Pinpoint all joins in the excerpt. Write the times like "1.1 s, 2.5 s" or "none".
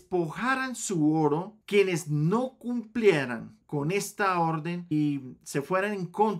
1.6 s